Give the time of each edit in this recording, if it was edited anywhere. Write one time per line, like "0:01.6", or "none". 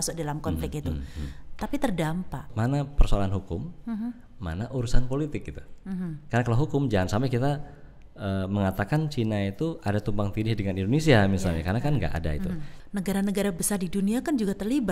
0:02.5
0:12.7

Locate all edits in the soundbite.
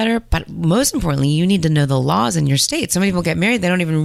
none

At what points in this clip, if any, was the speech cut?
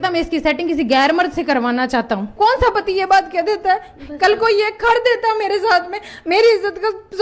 0:02.3

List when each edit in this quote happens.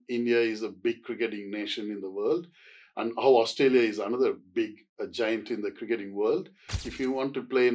0:06.8

